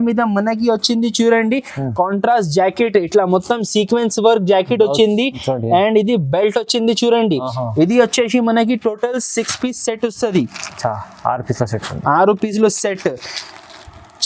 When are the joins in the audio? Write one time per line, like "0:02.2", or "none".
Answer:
none